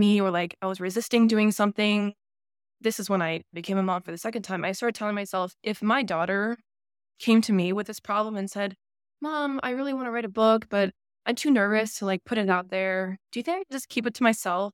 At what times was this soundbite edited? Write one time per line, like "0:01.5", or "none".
none